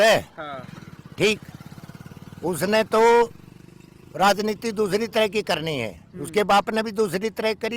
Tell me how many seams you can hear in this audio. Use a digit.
0